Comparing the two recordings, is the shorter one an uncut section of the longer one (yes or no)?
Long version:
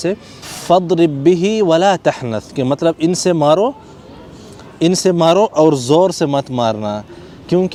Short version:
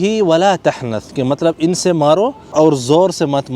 no